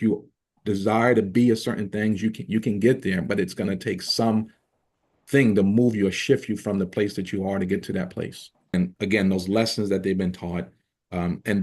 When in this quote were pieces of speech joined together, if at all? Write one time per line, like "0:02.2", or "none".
0:08.7